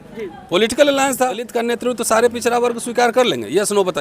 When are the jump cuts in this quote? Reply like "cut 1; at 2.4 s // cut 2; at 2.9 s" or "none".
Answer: cut 1; at 1.5 s